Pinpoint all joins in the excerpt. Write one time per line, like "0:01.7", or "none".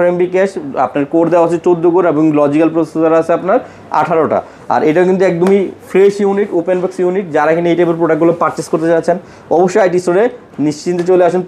none